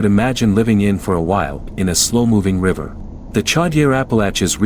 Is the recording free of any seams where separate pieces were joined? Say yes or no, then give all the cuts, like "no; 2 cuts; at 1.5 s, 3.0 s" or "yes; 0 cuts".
no; 1 cut; at 1.7 s